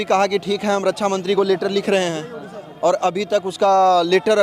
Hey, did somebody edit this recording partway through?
no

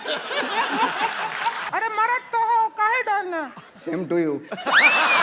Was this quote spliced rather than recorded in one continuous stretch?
yes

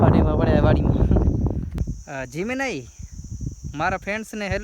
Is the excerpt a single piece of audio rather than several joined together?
no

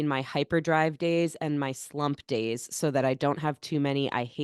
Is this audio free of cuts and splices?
yes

